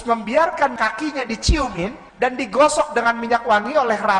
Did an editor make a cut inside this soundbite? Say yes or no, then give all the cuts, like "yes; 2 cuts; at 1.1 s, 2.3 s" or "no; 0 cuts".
yes; 2 cuts; at 0.8 s, 2.0 s